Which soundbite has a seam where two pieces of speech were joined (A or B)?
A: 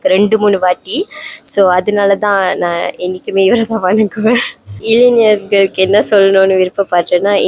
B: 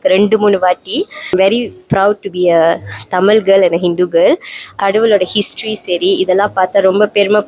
B